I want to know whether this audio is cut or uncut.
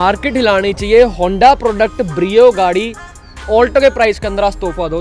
uncut